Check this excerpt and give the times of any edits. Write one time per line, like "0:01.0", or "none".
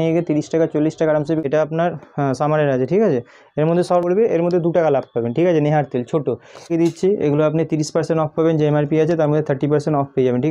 0:01.4
0:04.0
0:06.7